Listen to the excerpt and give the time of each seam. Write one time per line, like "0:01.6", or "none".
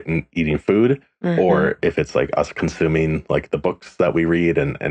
none